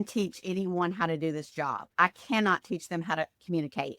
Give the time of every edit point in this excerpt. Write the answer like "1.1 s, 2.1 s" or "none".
1.8 s